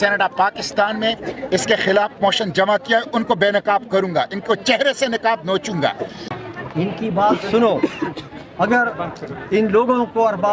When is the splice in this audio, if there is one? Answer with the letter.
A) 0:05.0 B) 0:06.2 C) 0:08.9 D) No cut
B